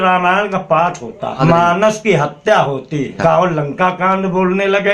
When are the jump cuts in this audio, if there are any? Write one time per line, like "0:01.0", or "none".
0:01.4
0:03.1